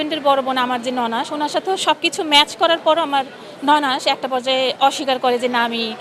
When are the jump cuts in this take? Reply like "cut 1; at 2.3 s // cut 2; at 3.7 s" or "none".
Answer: none